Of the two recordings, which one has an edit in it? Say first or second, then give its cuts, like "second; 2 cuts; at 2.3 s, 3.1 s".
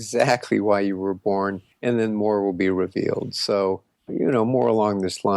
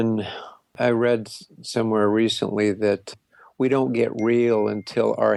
first; 2 cuts; at 1.7 s, 3.9 s